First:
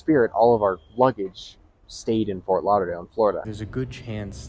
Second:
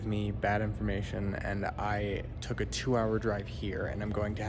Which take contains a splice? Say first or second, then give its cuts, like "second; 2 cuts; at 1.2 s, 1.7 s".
first; 1 cut; at 3.6 s